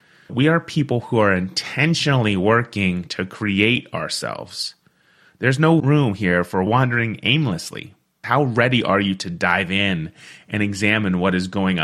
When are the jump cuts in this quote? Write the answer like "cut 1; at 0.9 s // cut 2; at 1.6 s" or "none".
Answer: cut 1; at 8.2 s